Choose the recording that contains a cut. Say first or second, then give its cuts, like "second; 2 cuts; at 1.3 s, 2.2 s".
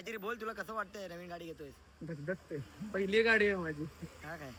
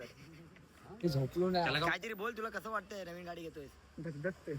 second; 1 cut; at 1.0 s